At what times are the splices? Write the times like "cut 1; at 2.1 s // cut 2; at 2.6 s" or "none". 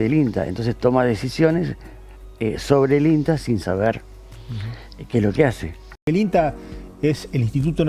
cut 1; at 6.0 s